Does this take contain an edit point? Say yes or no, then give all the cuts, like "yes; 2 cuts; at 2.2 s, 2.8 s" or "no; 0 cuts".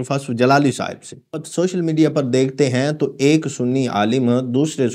yes; 1 cut; at 1.4 s